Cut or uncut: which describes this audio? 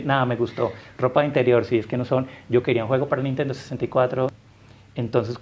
cut